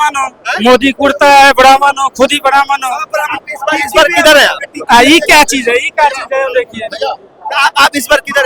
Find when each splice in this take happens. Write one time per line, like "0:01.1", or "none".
none